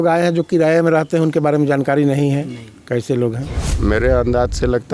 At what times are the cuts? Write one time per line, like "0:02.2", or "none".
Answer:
0:03.5